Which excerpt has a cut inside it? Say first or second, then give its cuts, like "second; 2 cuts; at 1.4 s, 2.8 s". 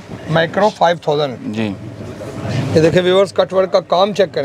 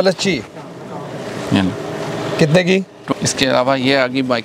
second; 1 cut; at 3.0 s